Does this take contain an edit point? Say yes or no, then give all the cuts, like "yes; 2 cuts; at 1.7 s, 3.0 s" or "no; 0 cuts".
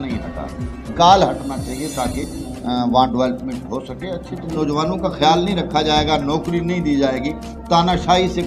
yes; 2 cuts; at 0.9 s, 4.5 s